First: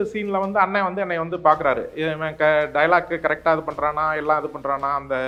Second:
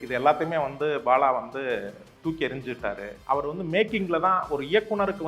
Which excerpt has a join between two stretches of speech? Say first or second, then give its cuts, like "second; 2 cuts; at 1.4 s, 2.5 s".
second; 1 cut; at 3.1 s